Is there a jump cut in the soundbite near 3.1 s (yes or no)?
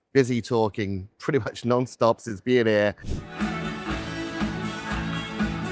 yes